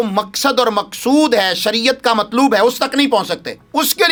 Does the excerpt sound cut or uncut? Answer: uncut